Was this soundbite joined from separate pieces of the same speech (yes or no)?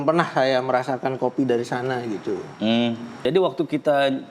yes